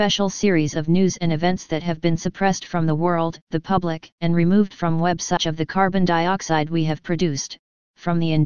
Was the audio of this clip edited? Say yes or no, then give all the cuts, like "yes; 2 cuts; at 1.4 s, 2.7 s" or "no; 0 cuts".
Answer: no; 0 cuts